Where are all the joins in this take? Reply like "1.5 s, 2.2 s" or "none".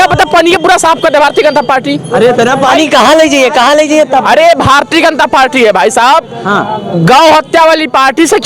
none